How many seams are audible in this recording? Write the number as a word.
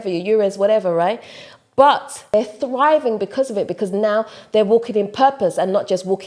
one